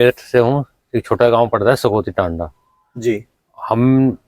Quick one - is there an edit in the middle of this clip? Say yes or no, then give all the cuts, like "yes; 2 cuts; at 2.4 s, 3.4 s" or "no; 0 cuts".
no; 0 cuts